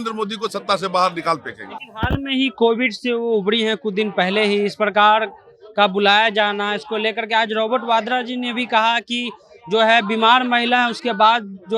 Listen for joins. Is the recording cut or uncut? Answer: uncut